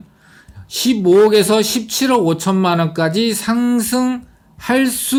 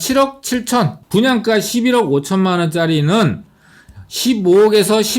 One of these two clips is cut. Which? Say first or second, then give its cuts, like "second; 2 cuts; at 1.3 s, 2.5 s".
second; 1 cut; at 1.0 s